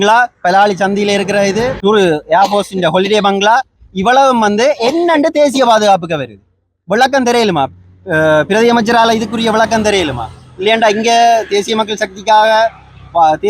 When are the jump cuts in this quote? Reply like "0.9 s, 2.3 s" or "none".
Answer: 1.8 s